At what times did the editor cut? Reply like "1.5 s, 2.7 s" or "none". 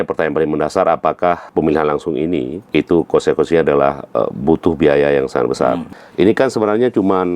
1.5 s, 2.6 s, 6.0 s